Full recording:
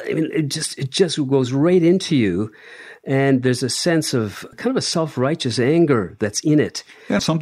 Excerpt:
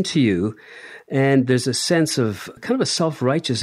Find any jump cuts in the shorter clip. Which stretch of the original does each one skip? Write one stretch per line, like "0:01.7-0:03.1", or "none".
none